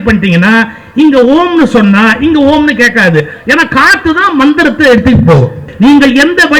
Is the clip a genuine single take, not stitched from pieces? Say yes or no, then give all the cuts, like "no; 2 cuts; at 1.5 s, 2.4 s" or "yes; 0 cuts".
no; 1 cut; at 5.7 s